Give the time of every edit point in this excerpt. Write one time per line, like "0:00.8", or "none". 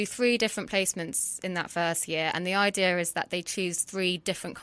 none

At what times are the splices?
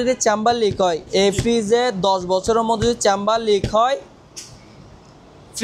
none

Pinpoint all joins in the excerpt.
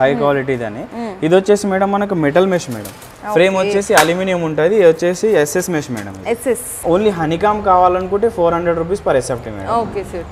0:06.7

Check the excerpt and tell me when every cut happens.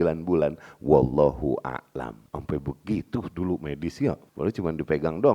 0:02.2
0:04.3

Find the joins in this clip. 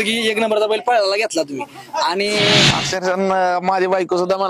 0:02.8

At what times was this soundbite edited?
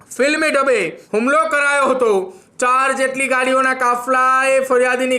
0:01.0
0:02.4

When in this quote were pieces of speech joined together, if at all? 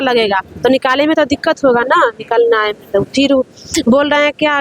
none

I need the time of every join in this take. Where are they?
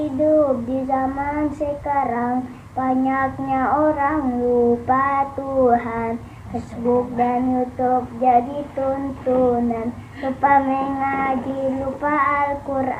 none

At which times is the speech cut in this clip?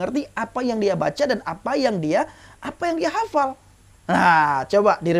none

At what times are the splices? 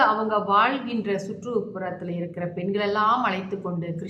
none

